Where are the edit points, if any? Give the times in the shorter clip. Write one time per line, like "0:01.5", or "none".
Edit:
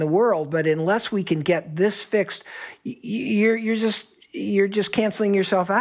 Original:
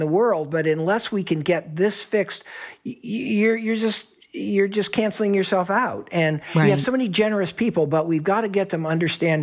none